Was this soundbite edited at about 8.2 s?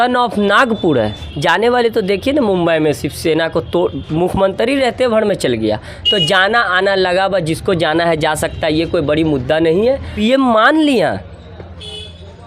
no; 2 cuts; at 1.0 s, 10.1 s

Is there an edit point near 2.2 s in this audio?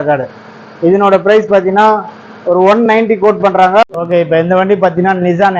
no; 1 cut; at 3.8 s

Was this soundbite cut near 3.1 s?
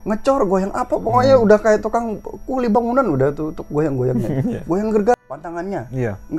no; 1 cut; at 5.1 s

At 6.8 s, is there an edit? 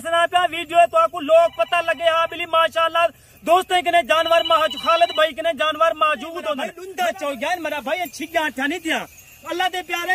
yes; 1 cut; at 6.8 s

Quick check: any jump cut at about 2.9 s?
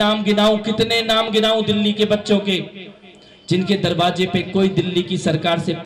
no; 0 cuts

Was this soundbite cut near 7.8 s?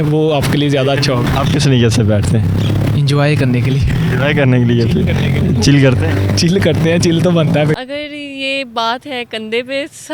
yes; 2 cuts; at 1.3 s, 7.8 s

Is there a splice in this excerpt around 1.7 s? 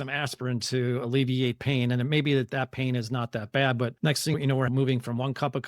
no; 1 cut; at 4.4 s

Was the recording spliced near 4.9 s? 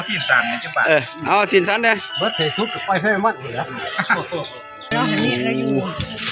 yes; 1 cut; at 4.9 s

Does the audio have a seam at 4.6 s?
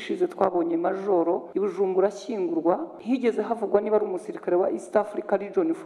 no; 2 cuts; at 1.5 s, 2.9 s

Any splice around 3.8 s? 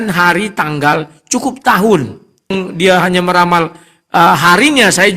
no; 1 cut; at 2.5 s

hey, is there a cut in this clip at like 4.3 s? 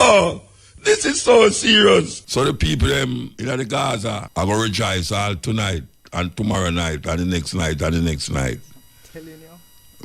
yes; 3 cuts; at 2.2 s, 3.3 s, 4.3 s

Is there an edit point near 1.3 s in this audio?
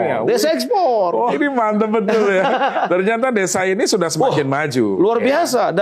yes; 1 cut; at 1.3 s

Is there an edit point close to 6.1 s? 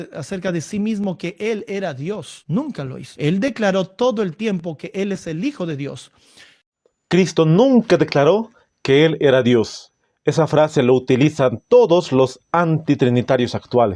no; 0 cuts

